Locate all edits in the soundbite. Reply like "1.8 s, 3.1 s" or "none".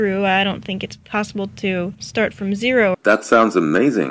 2.0 s, 3.0 s